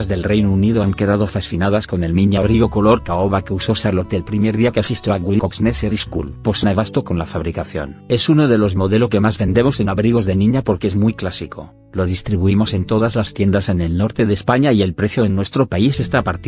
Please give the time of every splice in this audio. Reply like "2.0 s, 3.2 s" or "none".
none